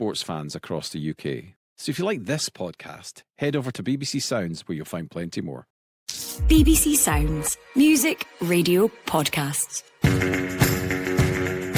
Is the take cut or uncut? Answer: cut